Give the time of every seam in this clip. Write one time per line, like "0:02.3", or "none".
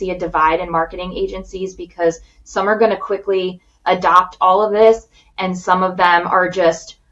none